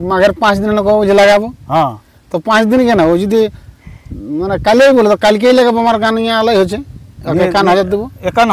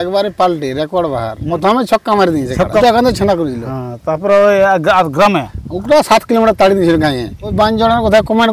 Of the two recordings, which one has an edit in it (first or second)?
second